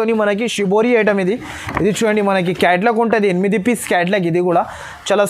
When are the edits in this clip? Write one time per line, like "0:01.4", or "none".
none